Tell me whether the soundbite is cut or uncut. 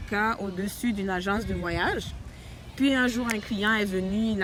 uncut